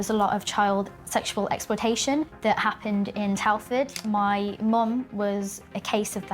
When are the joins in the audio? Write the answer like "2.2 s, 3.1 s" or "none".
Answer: 2.3 s, 4.0 s